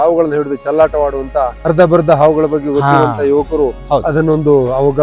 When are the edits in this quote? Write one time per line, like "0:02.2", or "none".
0:01.6